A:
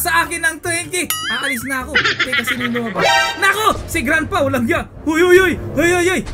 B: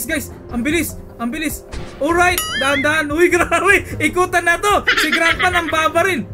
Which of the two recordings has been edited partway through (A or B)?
A